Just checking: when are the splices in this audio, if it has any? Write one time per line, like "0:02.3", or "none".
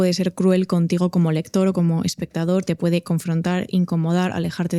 none